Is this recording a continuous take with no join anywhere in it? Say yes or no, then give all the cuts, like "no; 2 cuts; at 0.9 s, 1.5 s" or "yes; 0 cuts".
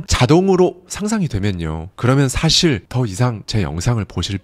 no; 1 cut; at 3.1 s